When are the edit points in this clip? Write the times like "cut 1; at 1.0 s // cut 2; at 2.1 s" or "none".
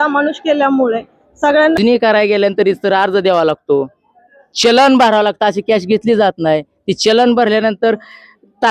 cut 1; at 1.8 s